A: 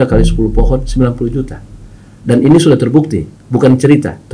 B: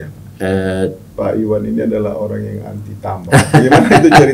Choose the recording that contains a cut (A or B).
B